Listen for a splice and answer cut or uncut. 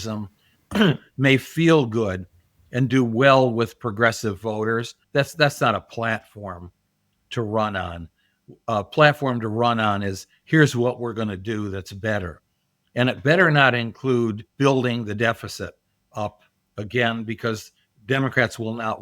cut